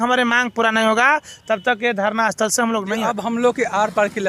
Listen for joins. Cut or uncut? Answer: cut